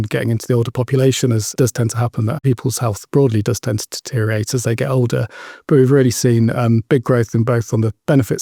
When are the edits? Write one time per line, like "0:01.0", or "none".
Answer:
none